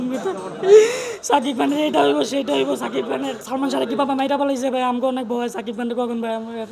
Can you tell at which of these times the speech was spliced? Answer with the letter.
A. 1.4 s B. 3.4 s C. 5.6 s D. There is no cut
B